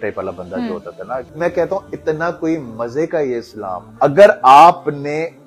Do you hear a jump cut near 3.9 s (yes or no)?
yes